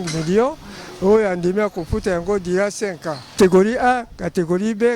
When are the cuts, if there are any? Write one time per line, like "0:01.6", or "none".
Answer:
0:03.4